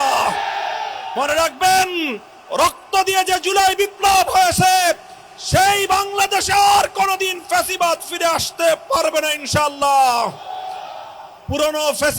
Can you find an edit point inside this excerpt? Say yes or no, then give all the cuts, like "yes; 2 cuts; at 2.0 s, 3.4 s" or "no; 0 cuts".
yes; 1 cut; at 1.0 s